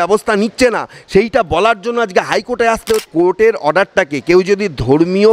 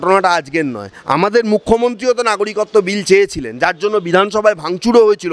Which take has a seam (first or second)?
first